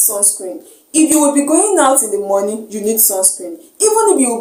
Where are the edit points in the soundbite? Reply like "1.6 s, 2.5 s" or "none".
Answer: none